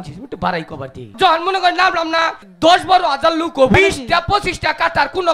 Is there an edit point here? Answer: yes; 3 cuts; at 1.1 s, 2.4 s, 3.8 s

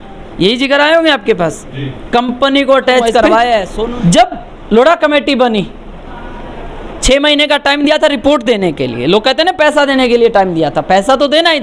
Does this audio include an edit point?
yes; 1 cut; at 3.8 s

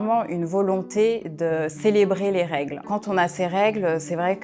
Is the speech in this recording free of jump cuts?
no; 1 cut; at 2.9 s

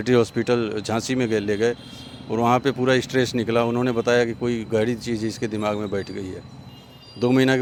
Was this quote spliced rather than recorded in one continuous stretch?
no; 0 cuts

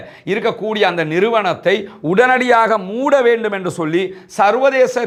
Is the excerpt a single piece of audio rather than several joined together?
yes; 0 cuts

